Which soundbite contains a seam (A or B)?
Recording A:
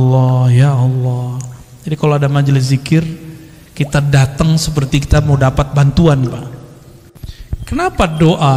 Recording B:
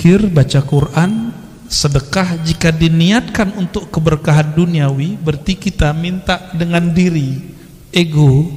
A